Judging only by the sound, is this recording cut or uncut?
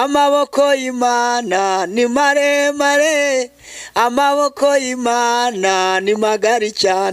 uncut